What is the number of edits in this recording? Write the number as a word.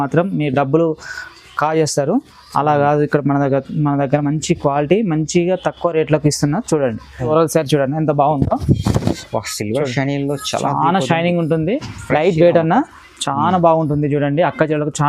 one